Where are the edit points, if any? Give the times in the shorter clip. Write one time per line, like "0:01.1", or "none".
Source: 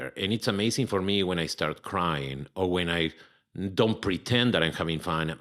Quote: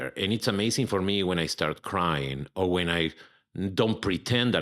none